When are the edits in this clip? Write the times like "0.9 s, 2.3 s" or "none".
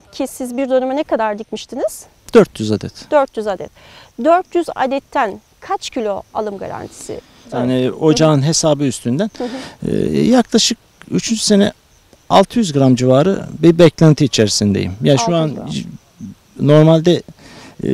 7.5 s